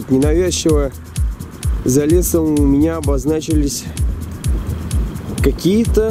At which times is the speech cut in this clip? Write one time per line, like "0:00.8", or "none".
none